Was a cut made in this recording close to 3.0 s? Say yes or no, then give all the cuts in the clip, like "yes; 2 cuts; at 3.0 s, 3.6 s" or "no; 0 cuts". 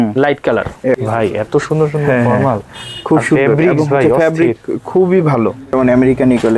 no; 2 cuts; at 1.0 s, 5.8 s